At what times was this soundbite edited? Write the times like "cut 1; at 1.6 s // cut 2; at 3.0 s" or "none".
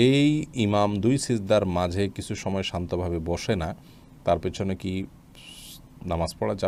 none